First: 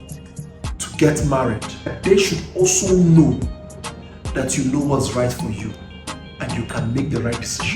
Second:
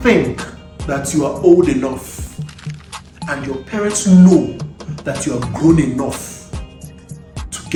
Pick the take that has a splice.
first; 1 cut; at 2.0 s

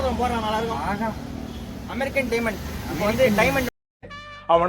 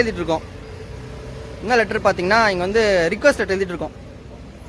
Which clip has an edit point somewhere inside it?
first; 1 cut; at 3.7 s

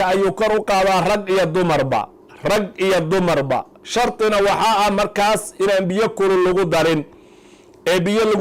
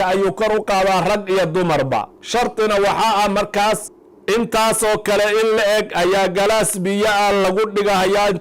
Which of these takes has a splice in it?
second; 2 cuts; at 2.2 s, 3.9 s

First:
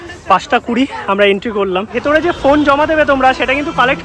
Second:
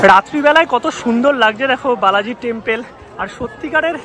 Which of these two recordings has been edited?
first; 1 cut; at 1.9 s

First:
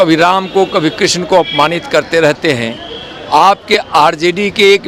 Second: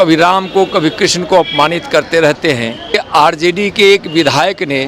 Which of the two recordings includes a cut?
second; 1 cut; at 3.0 s

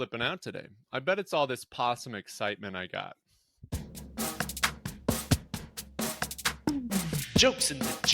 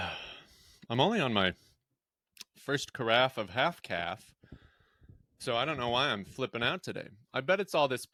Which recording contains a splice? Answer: first; 1 cut; at 3.7 s

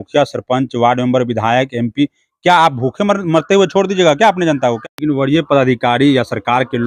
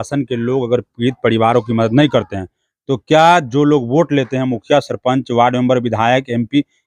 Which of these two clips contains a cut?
first; 1 cut; at 4.8 s

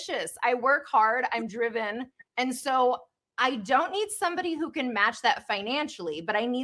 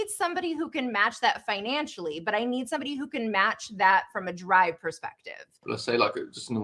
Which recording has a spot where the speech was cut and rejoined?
second; 1 cut; at 5.7 s

